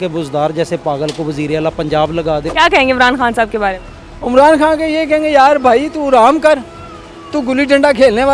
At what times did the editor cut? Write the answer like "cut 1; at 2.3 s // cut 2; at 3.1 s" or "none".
cut 1; at 2.5 s